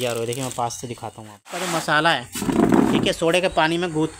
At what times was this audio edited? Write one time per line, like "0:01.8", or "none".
0:01.7

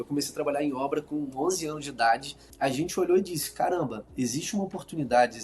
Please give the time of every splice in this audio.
0:02.4

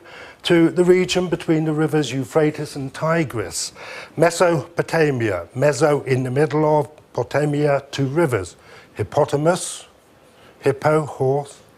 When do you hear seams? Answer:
0:01.4

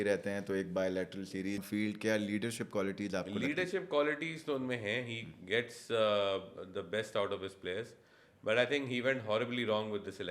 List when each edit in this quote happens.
0:01.6

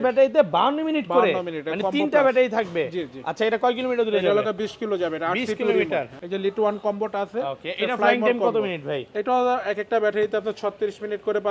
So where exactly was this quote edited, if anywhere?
0:06.2

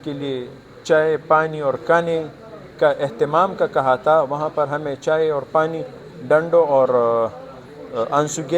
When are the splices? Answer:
none

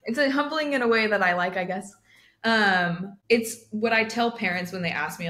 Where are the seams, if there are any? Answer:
0:03.1

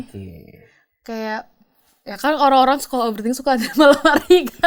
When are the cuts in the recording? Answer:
none

